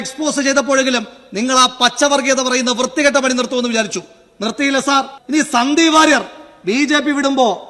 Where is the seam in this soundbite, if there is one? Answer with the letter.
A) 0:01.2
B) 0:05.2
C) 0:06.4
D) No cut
B